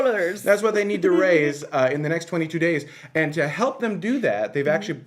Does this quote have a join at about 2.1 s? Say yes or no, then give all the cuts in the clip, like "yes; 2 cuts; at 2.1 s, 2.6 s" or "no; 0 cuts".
no; 0 cuts